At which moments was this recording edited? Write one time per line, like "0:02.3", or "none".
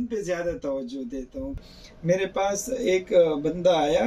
0:01.6